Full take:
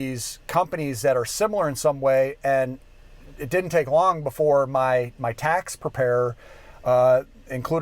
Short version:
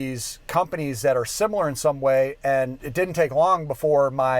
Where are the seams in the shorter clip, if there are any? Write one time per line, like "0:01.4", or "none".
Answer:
0:02.8